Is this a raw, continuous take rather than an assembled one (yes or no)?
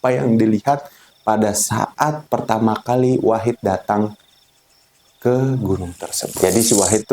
no